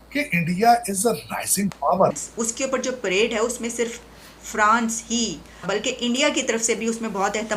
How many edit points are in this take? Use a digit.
2